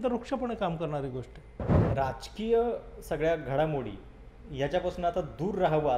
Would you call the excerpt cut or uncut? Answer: cut